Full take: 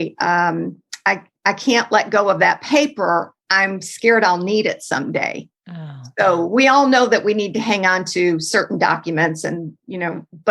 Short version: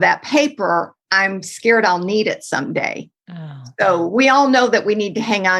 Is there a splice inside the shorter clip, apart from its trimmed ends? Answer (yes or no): no